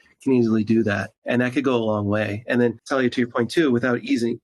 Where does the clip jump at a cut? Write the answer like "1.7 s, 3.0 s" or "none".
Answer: 1.1 s, 2.8 s